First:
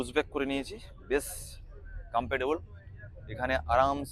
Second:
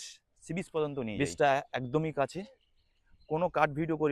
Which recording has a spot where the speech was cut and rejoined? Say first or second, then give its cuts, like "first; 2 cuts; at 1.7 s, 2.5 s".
second; 1 cut; at 1.1 s